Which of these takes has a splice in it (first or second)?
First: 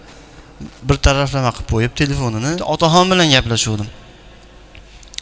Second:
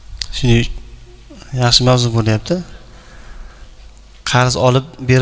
first